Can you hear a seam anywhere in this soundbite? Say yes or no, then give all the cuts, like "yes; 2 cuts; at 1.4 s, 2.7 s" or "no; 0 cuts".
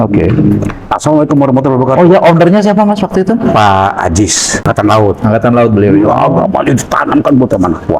yes; 1 cut; at 4.7 s